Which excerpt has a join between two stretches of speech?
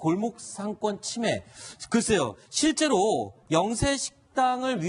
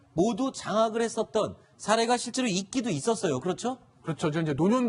first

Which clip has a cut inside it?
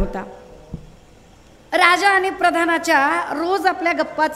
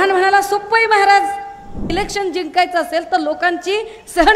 second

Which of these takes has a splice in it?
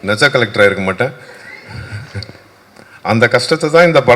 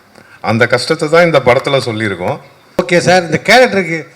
second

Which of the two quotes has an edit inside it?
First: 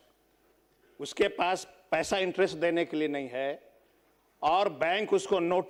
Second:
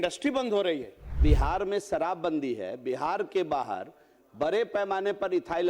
second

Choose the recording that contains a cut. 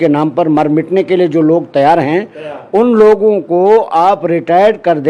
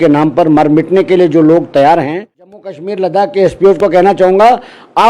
second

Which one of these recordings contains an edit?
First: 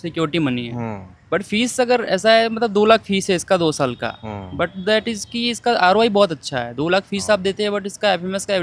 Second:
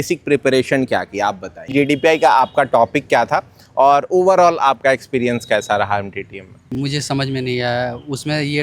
second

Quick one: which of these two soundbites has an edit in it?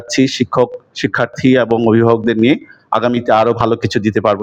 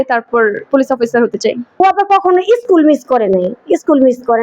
second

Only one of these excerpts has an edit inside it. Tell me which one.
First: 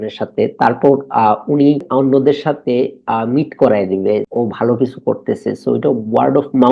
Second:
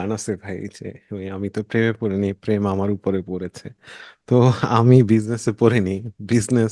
first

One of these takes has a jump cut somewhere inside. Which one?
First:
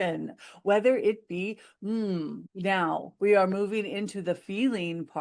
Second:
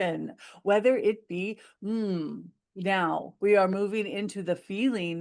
first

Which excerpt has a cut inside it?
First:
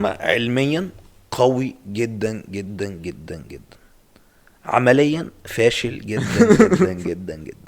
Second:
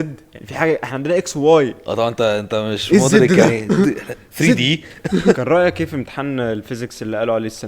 second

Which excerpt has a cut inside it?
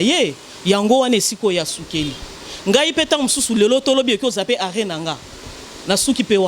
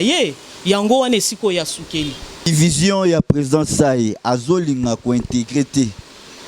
second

